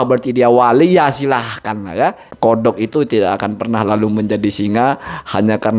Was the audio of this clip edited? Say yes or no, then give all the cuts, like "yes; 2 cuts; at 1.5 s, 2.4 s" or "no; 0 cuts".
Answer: yes; 1 cut; at 2.5 s